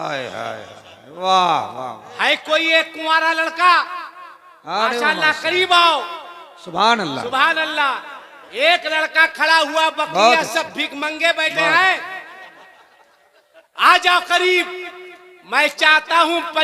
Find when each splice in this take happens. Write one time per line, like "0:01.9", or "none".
none